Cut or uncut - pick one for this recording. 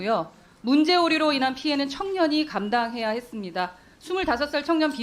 uncut